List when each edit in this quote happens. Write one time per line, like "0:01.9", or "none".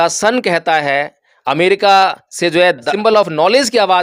0:02.9

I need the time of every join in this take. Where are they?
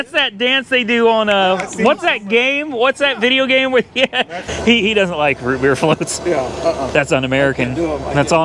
0:04.4

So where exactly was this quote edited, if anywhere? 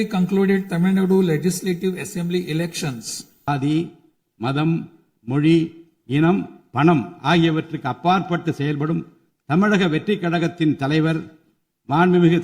0:03.5

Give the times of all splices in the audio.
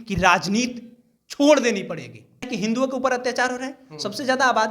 0:02.5

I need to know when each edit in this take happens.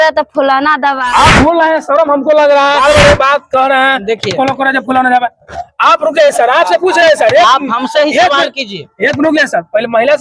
0:01.0
0:02.8

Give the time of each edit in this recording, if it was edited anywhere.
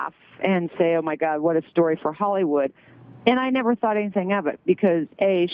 none

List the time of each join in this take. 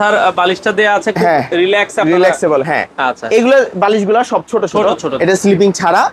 0:05.1

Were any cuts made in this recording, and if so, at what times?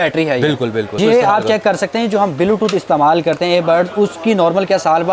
0:01.0

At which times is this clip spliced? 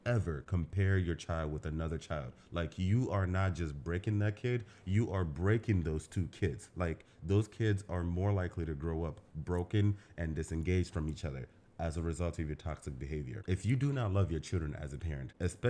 0:13.4

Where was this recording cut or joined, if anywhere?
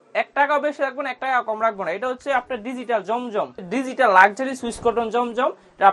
0:03.6

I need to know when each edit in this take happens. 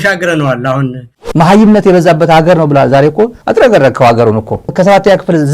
0:01.2
0:04.6

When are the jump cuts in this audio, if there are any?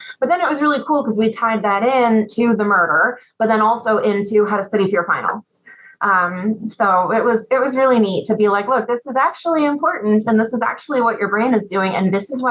none

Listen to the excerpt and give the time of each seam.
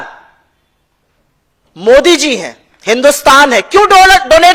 none

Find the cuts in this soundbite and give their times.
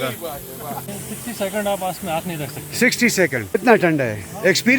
0:00.9
0:03.5

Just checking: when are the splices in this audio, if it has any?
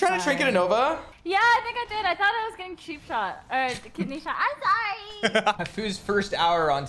0:01.1
0:05.6

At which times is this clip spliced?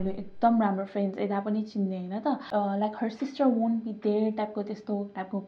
0:02.4

